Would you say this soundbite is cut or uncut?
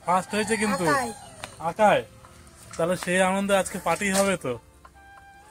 uncut